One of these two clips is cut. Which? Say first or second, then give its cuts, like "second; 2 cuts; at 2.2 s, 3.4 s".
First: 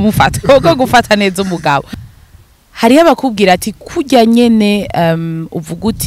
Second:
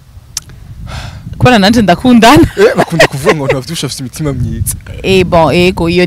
first; 1 cut; at 2.0 s